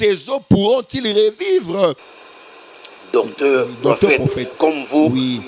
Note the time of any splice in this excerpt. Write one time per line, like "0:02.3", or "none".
0:02.0